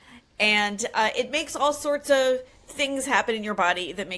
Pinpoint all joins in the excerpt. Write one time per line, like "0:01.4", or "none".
none